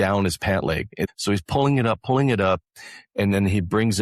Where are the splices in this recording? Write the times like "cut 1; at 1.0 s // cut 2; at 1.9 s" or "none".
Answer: cut 1; at 1.1 s